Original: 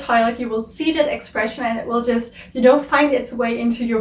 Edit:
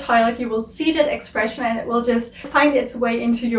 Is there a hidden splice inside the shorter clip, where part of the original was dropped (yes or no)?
yes